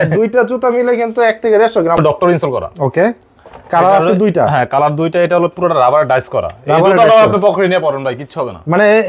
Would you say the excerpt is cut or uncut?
cut